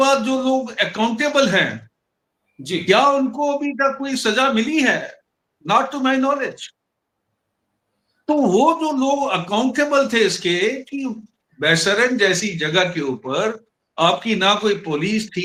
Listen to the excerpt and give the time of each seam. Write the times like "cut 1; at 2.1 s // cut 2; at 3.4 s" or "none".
none